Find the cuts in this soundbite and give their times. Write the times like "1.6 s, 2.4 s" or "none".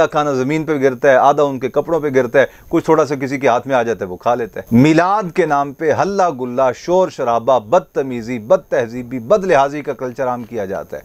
none